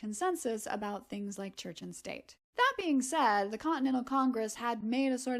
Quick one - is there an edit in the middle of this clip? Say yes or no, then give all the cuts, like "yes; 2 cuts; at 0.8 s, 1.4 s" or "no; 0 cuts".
no; 0 cuts